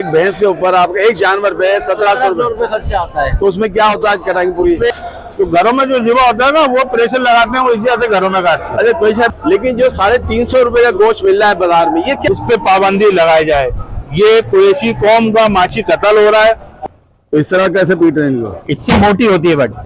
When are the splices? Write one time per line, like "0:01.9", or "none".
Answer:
0:04.9
0:09.3
0:12.2
0:16.9